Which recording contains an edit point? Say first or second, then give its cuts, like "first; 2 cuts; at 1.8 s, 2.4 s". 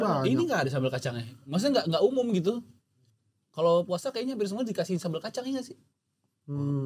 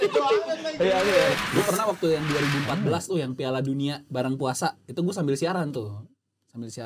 second; 1 cut; at 1.4 s